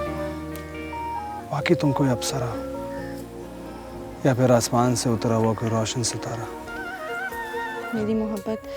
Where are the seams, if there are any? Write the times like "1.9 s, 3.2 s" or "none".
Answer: 0.9 s, 4.1 s, 7.8 s